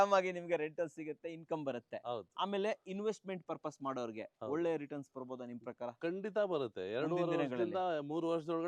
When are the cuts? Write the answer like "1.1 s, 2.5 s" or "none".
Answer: none